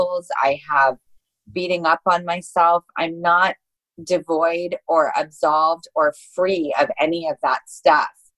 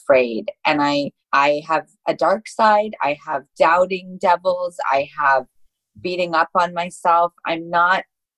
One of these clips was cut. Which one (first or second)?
second